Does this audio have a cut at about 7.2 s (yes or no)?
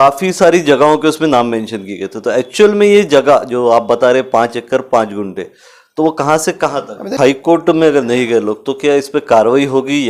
yes